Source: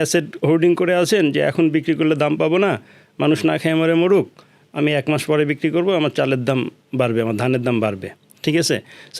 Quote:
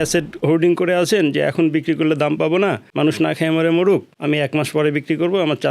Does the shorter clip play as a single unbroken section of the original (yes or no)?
no